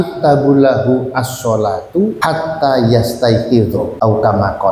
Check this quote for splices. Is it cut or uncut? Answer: cut